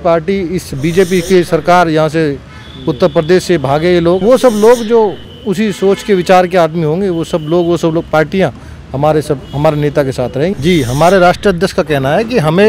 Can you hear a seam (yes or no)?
yes